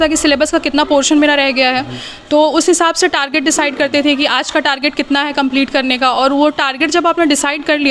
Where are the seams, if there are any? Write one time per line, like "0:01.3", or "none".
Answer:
none